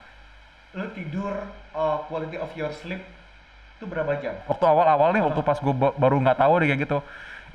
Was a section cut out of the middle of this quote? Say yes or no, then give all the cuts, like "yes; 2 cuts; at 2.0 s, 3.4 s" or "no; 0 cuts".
yes; 1 cut; at 4.6 s